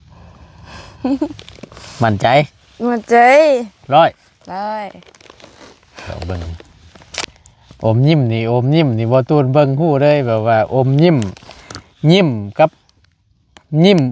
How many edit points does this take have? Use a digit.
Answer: 1